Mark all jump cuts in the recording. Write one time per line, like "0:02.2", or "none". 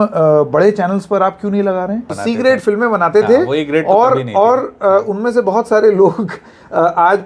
0:02.2